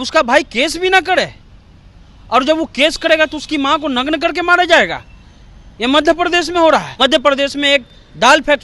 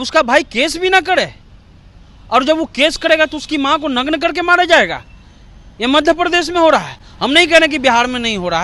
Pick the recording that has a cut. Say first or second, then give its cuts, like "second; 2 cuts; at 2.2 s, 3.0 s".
first; 1 cut; at 6.9 s